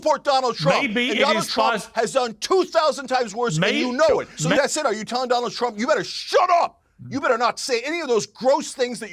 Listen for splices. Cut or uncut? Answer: cut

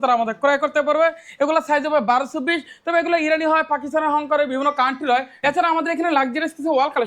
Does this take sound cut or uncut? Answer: cut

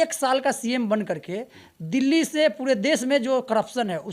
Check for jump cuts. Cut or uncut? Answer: uncut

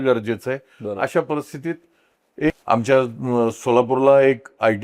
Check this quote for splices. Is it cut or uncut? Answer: cut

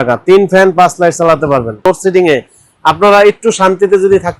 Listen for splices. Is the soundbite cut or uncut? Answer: cut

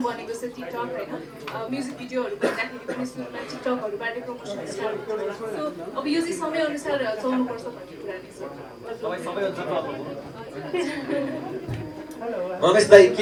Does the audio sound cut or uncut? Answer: uncut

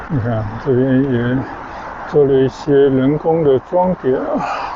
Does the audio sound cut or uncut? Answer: uncut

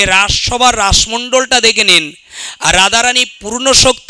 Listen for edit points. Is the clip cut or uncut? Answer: uncut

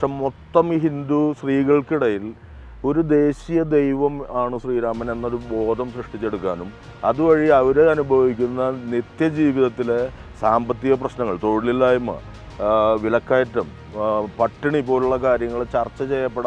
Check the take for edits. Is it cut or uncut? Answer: uncut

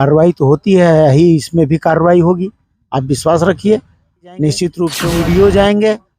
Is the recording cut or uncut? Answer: cut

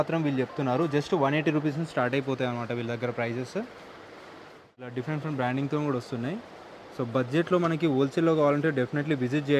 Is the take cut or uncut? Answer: cut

